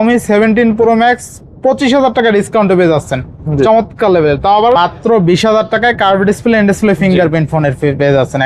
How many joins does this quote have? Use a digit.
1